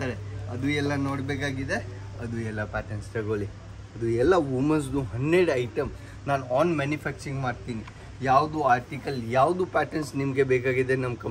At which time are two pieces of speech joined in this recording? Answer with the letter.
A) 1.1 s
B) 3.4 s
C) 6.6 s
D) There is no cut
D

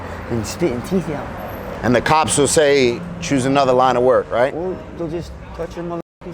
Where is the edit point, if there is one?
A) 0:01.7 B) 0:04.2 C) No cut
A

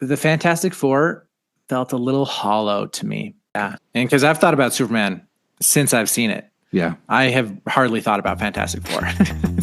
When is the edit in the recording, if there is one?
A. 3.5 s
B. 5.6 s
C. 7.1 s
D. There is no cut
A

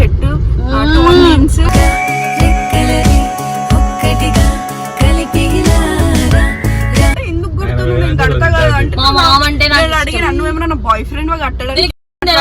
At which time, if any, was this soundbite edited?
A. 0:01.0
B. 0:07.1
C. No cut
B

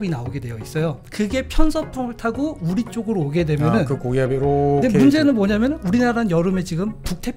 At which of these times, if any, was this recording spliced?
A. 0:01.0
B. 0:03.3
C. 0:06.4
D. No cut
A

